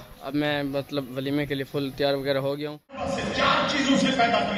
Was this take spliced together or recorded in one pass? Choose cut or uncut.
cut